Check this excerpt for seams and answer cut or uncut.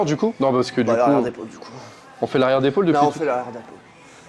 uncut